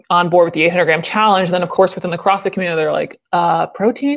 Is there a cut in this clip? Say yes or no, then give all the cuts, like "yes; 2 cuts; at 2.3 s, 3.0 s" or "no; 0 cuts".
yes; 1 cut; at 1.7 s